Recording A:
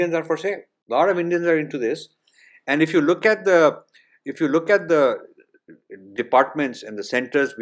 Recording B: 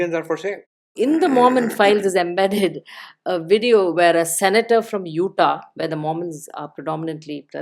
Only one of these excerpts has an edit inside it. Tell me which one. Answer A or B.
B